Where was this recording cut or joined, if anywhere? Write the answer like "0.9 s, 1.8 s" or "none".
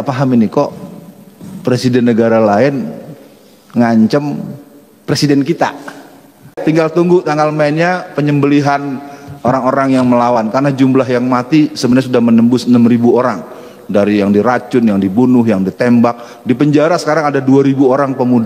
6.6 s